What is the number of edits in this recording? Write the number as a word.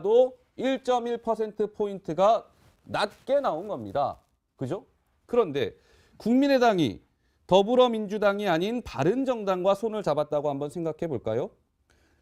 zero